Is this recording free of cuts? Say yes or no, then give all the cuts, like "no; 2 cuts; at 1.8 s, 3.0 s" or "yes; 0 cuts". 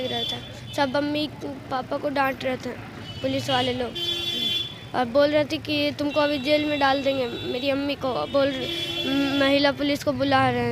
yes; 0 cuts